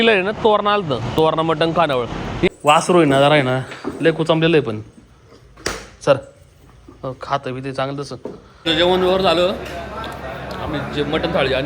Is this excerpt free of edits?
no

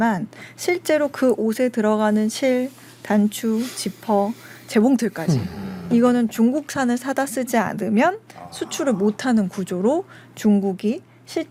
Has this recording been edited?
no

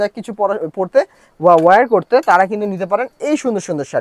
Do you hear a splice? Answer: no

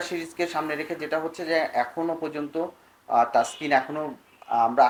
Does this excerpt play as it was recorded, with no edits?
yes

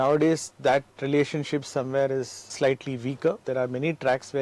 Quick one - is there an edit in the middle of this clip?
yes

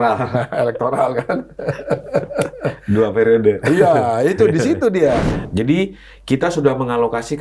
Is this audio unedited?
no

